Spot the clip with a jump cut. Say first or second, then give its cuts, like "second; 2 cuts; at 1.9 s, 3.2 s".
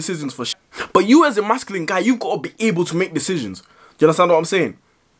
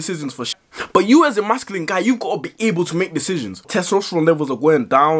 second; 1 cut; at 3.6 s